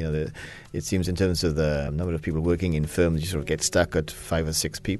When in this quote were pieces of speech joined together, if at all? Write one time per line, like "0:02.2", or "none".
0:01.9
0:03.5
0:04.2